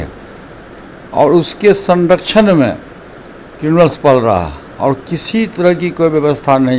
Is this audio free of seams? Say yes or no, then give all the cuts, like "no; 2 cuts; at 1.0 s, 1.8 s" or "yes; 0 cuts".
yes; 0 cuts